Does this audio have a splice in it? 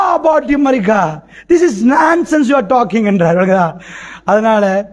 no; 0 cuts

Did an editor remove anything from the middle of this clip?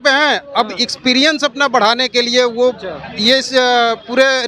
no; 0 cuts

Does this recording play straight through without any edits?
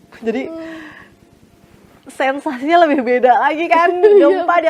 yes; 0 cuts

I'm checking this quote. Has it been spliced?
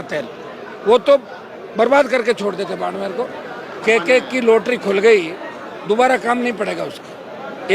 yes; 1 cut; at 3.8 s

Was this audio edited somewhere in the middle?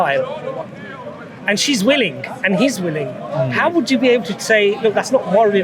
no; 0 cuts

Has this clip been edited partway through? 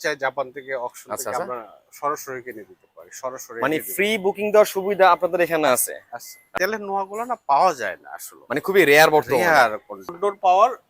yes; 2 cuts; at 6.5 s, 10.2 s

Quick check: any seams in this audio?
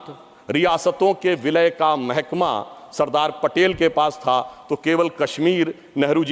no; 0 cuts

